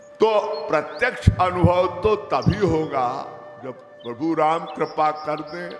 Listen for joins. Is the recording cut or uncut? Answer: uncut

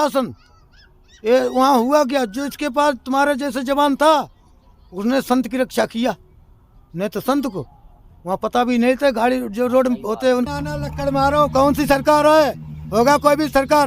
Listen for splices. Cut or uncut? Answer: cut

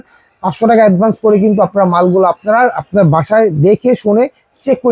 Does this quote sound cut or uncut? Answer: uncut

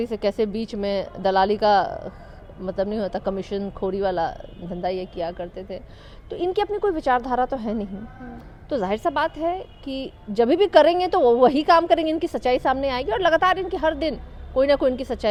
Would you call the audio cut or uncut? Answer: uncut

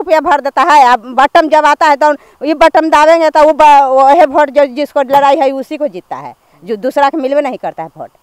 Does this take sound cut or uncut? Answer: uncut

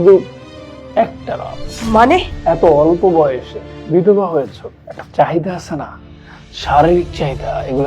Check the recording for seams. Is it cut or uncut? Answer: cut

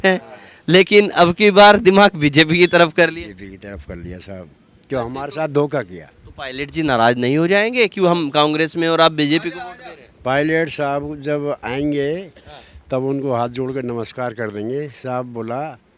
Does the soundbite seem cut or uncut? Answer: uncut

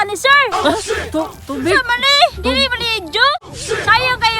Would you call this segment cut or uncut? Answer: cut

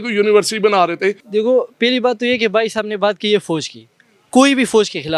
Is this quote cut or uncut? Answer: cut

